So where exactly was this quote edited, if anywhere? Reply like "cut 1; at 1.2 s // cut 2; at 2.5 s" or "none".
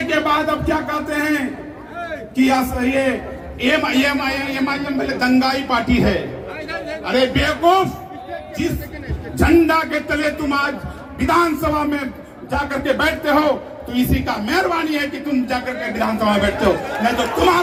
none